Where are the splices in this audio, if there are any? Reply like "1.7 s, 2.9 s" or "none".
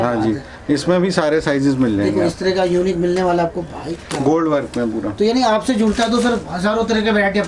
none